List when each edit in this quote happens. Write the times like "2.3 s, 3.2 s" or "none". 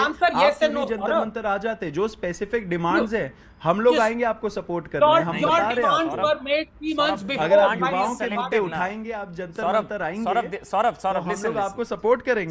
none